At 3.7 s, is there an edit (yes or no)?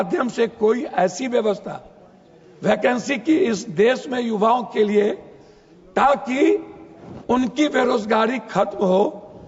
no